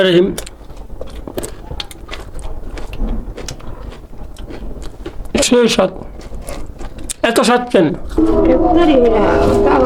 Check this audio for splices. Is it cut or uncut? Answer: uncut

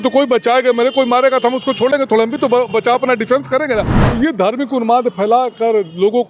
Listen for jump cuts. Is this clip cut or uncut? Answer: cut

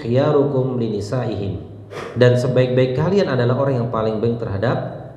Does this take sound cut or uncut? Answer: cut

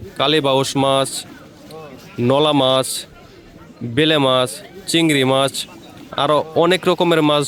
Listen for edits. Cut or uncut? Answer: uncut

